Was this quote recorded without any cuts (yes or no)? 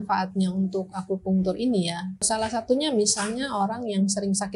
no